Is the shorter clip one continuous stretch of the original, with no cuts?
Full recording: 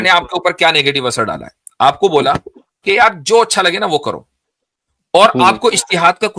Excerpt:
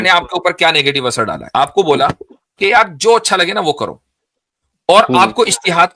no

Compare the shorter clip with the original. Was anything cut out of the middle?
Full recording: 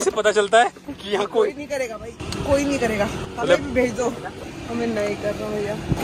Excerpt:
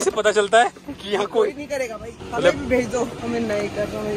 yes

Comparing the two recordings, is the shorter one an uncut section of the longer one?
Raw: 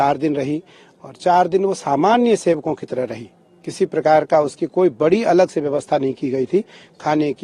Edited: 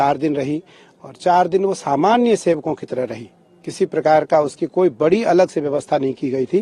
yes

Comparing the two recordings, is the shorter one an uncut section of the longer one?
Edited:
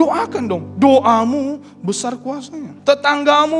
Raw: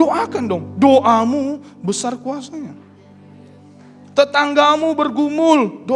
no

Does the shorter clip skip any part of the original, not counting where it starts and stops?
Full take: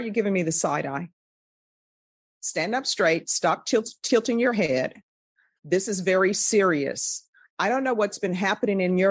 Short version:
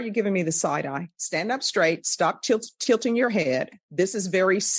yes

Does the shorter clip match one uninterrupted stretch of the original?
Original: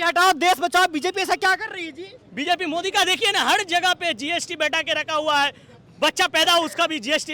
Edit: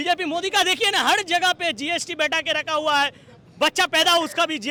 yes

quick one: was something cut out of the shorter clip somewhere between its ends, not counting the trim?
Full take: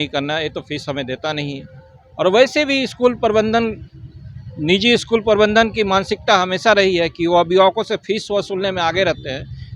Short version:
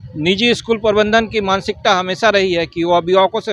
no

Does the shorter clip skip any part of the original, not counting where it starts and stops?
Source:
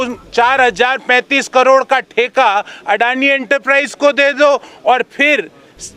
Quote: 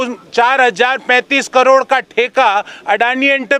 no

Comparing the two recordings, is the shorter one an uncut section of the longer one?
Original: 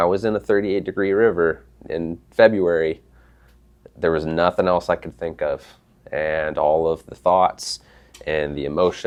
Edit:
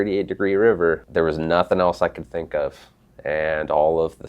no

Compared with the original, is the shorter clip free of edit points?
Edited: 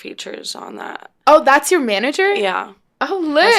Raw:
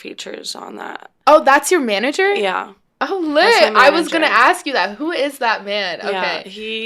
yes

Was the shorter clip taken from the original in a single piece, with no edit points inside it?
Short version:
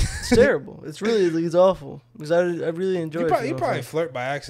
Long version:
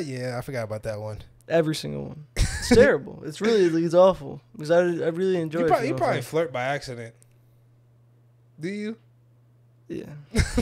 yes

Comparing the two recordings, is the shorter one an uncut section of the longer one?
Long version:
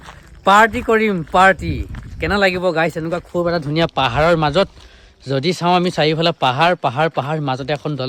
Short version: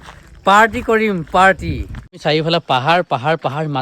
no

